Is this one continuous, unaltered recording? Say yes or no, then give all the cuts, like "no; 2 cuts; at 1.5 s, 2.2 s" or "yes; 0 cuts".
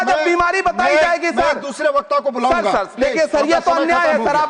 yes; 0 cuts